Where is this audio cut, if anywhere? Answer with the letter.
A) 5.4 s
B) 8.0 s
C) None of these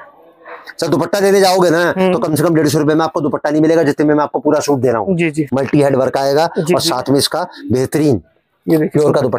A